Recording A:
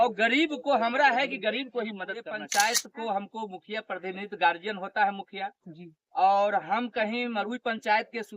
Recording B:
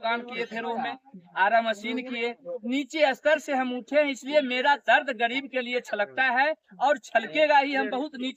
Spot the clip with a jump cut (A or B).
A